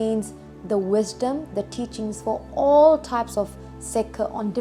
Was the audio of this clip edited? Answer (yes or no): no